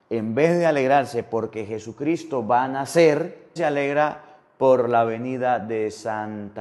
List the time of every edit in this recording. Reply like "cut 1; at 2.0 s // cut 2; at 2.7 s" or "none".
cut 1; at 3.6 s